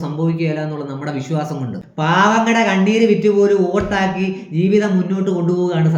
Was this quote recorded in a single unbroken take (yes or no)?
no